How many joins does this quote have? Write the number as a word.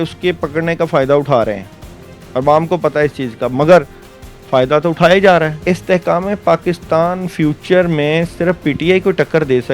one